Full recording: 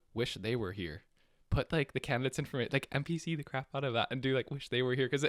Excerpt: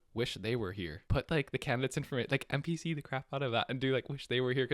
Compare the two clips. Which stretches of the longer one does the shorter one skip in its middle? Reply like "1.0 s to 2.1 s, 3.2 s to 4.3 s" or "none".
0.9 s to 1.4 s